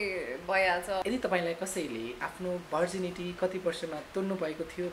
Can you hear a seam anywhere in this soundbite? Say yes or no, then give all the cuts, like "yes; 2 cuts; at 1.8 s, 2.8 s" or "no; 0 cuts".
yes; 1 cut; at 1.0 s